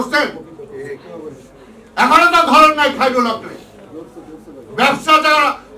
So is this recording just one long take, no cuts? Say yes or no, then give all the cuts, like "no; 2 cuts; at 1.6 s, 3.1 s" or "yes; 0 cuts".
yes; 0 cuts